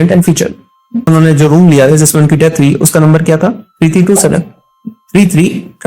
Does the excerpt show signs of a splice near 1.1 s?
yes; 1 cut; at 1.1 s

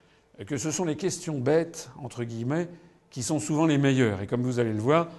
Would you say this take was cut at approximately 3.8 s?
no; 1 cut; at 0.9 s

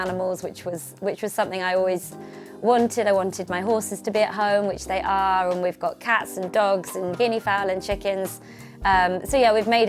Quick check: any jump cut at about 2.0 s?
no; 0 cuts

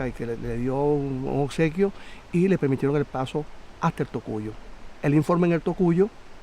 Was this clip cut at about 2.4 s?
yes; 1 cut; at 2.4 s

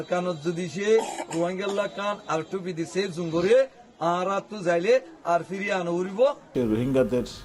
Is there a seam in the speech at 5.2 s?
no; 1 cut; at 6.5 s

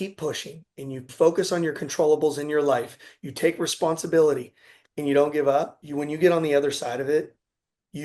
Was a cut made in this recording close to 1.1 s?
yes; 2 cuts; at 1.1 s, 5.8 s

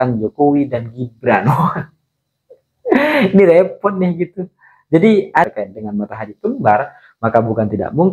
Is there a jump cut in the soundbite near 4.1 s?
no; 1 cut; at 5.5 s

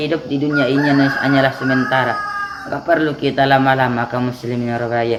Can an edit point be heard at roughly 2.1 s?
no; 0 cuts

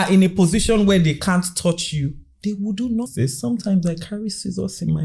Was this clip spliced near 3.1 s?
yes; 1 cut; at 3.1 s

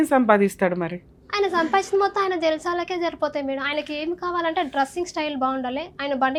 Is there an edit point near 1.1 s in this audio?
no; 0 cuts

